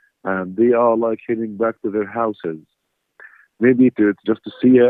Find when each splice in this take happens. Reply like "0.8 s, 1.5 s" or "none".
3.9 s